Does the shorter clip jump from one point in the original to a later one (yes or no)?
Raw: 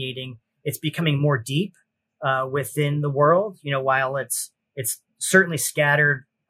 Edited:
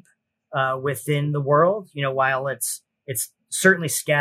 no